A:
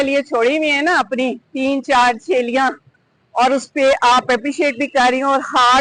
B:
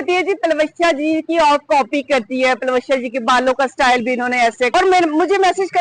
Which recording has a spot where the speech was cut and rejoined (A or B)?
B